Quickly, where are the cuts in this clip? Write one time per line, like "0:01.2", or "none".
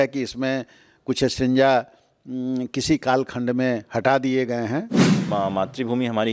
0:05.2